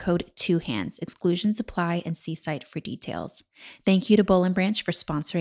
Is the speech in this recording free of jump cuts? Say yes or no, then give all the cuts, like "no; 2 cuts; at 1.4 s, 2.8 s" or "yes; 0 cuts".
yes; 0 cuts